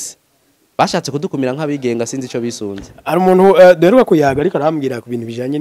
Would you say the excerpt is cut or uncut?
cut